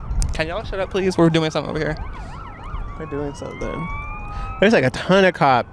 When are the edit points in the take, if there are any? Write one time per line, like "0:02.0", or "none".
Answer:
none